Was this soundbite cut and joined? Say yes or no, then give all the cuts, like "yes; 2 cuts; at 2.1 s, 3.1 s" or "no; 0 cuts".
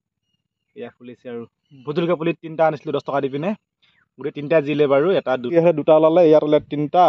yes; 1 cut; at 5.5 s